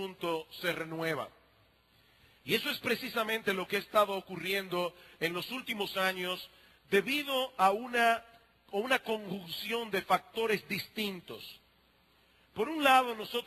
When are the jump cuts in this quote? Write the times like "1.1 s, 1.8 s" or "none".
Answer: none